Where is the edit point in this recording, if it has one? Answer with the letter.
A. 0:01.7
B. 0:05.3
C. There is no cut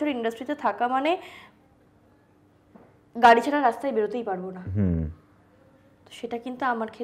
C